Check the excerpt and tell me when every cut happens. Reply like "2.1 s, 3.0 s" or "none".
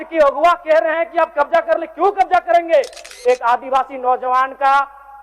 3.0 s